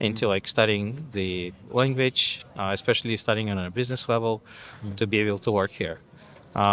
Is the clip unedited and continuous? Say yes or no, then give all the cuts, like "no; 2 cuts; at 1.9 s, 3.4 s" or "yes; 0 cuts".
yes; 0 cuts